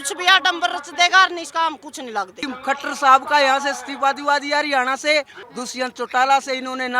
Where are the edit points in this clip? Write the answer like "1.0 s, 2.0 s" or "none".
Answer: 2.5 s, 5.4 s

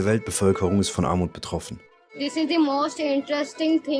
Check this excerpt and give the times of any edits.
2.1 s

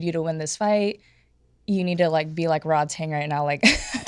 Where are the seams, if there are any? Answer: none

